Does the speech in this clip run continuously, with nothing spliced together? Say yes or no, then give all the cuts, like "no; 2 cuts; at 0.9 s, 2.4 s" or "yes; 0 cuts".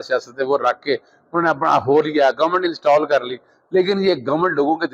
yes; 0 cuts